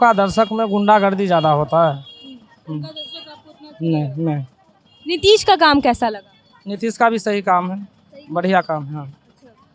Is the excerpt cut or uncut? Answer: uncut